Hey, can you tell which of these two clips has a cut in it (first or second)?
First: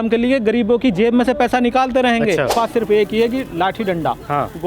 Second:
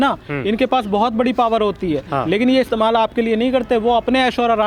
first